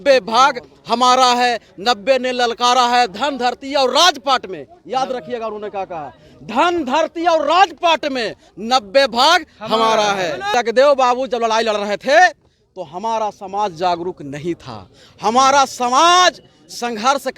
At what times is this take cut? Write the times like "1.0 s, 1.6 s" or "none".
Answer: 10.5 s